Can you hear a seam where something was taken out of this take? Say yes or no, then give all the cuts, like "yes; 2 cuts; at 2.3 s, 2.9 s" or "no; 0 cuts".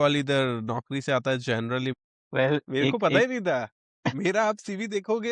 yes; 1 cut; at 1.9 s